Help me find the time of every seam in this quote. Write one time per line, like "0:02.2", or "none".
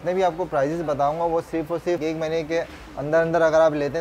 0:02.0